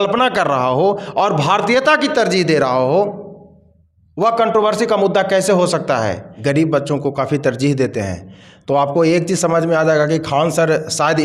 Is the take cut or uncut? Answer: cut